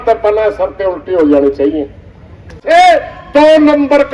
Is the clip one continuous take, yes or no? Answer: no